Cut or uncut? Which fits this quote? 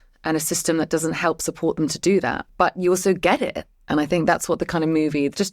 cut